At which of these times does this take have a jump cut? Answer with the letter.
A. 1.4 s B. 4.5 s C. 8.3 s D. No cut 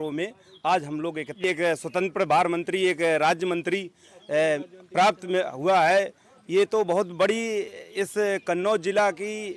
A